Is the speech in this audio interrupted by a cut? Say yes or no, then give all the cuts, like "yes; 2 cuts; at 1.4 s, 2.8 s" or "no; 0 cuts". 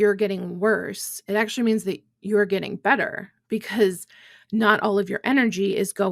no; 0 cuts